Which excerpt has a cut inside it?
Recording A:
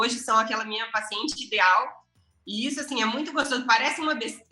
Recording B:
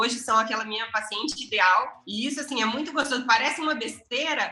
B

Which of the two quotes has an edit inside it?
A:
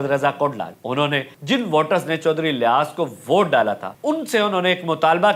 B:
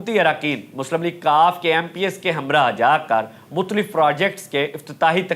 A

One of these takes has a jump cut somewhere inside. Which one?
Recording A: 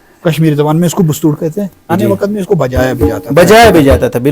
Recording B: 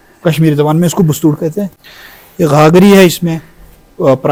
A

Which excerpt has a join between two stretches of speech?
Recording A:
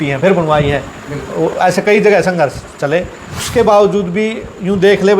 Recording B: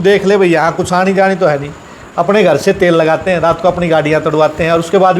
A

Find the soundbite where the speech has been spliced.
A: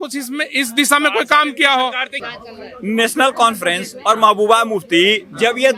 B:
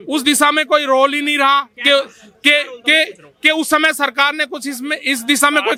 A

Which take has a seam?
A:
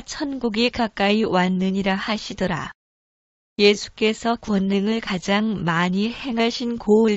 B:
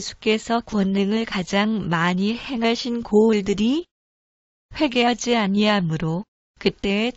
A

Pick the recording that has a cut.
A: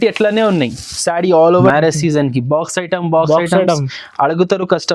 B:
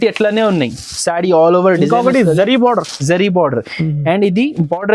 A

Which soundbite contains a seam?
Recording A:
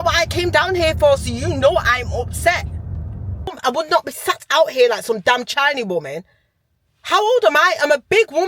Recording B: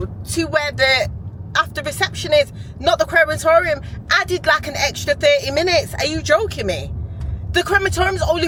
A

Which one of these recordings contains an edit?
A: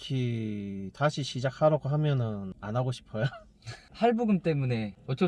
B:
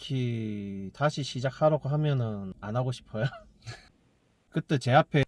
B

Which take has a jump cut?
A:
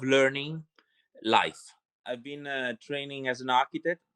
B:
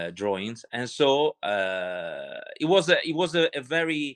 A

